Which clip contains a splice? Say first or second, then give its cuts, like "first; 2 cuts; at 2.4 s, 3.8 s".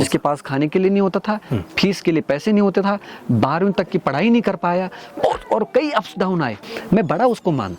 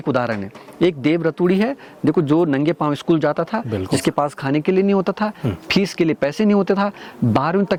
first; 1 cut; at 6.7 s